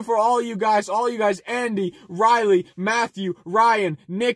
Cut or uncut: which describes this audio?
uncut